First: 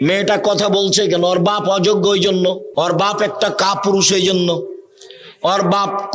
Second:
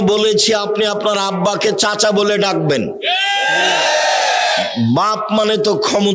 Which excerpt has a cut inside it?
first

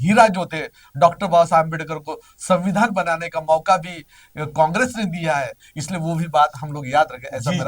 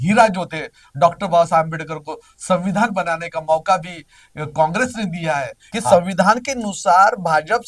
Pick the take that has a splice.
second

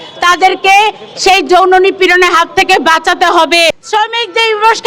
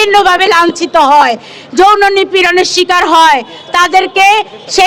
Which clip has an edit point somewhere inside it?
first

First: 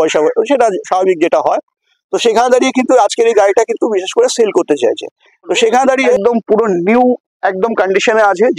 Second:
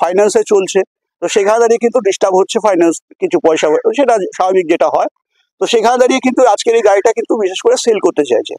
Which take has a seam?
first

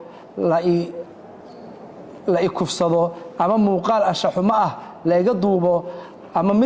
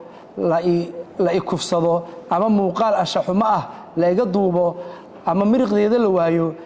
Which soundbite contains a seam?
second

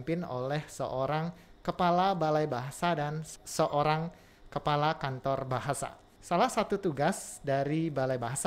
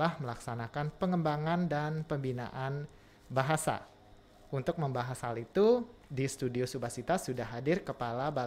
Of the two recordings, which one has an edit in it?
first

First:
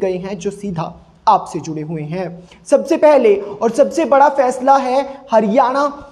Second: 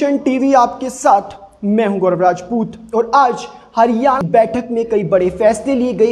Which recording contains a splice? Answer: second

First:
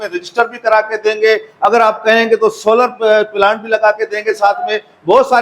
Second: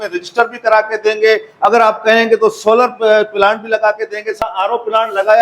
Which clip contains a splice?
second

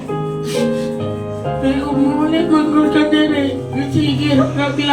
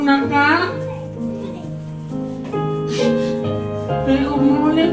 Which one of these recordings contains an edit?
first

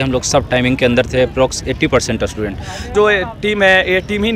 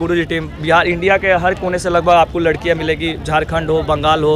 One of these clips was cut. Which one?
first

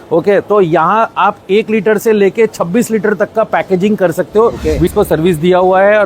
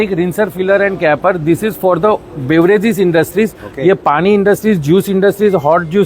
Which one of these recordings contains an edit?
first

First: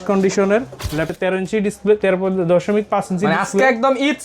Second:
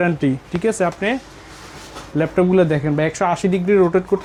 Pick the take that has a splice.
first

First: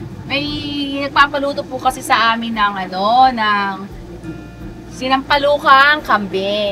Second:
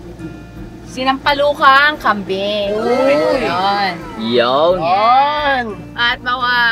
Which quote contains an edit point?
second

